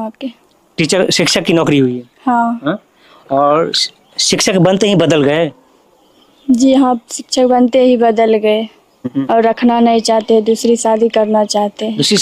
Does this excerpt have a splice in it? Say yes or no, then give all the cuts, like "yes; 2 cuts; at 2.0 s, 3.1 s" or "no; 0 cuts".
no; 0 cuts